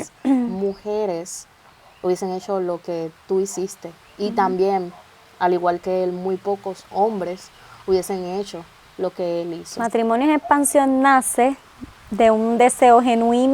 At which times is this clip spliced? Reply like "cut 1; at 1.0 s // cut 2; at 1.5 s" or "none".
cut 1; at 9.7 s